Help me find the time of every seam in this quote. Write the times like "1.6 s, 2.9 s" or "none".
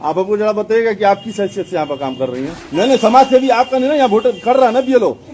2.6 s

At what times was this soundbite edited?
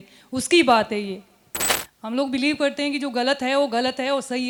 none

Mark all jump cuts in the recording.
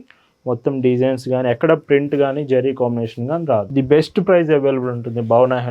3.7 s

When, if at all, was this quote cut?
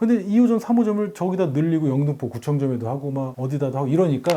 none

